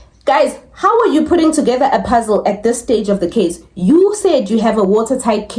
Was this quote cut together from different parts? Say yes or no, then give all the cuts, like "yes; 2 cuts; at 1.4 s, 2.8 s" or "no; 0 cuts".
no; 0 cuts